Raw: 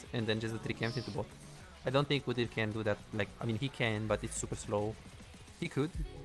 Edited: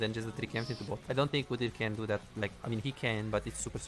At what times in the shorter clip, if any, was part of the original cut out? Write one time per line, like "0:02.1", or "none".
0:01.0